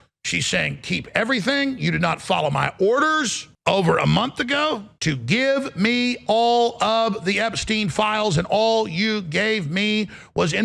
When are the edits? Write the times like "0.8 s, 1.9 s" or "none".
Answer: 3.4 s, 4.9 s